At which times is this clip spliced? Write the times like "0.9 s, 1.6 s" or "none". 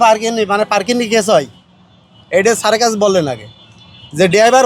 none